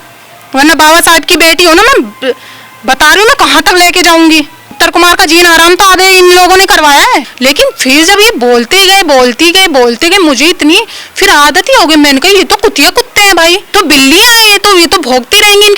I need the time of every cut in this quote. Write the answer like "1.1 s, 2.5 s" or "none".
4.6 s, 7.3 s, 13.6 s